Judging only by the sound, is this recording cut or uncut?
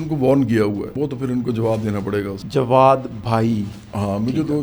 cut